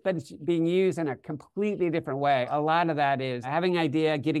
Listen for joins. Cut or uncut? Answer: cut